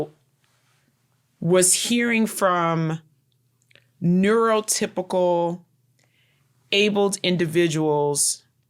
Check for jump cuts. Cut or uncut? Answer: uncut